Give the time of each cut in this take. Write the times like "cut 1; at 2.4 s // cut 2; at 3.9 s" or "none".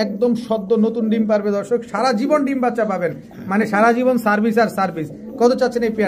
none